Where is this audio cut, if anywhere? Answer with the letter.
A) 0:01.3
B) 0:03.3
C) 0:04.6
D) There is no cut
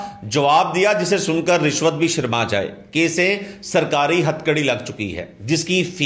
D